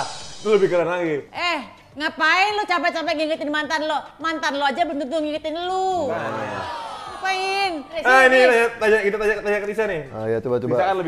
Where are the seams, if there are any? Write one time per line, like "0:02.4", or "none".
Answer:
0:01.3
0:08.0